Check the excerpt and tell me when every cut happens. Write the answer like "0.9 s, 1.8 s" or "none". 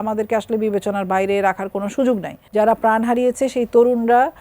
2.4 s